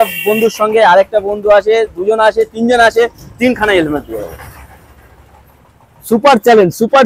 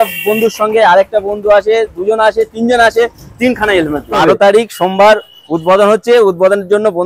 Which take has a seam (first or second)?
second